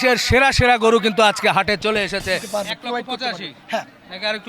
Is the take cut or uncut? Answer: cut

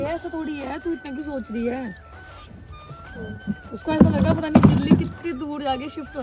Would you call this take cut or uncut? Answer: uncut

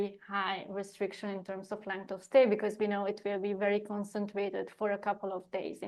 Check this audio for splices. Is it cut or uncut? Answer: uncut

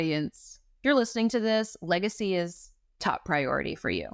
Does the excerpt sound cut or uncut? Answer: uncut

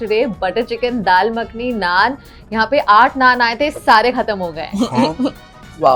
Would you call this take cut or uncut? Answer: uncut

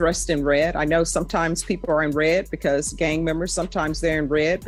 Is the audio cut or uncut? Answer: uncut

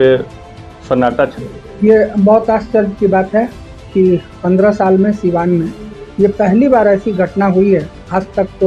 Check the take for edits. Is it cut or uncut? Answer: cut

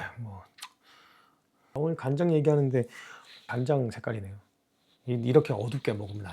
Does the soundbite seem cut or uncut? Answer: cut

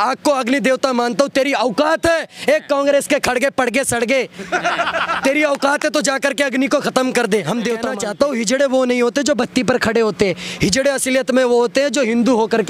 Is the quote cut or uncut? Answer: cut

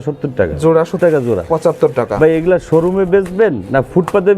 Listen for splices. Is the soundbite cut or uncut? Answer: cut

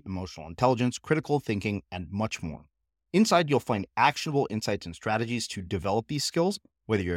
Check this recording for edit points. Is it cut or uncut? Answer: uncut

